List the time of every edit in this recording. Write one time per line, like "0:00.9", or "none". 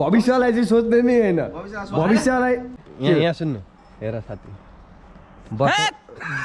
0:02.8